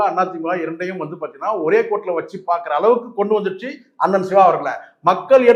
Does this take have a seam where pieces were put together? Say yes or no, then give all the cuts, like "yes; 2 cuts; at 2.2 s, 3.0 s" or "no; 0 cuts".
no; 0 cuts